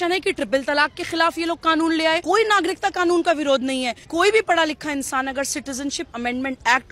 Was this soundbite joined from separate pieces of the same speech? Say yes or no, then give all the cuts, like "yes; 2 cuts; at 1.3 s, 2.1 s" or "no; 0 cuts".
yes; 2 cuts; at 2.2 s, 4.0 s